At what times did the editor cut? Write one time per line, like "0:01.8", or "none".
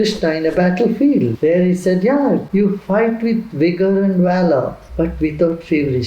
0:01.3
0:02.5
0:04.8